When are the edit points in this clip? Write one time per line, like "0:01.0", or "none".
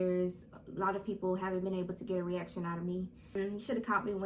0:03.4